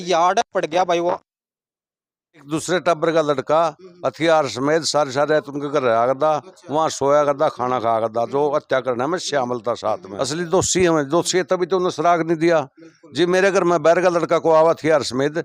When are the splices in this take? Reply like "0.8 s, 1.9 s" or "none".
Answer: 2.4 s, 10.1 s